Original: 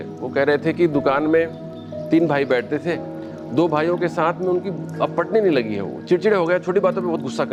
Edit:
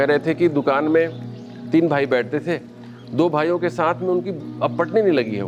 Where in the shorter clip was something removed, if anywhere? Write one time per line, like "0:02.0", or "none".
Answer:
none